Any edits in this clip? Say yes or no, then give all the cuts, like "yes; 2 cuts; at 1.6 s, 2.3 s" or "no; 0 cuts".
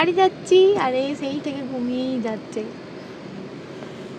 no; 0 cuts